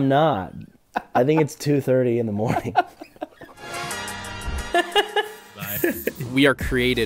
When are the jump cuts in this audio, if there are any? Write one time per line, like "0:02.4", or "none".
0:03.7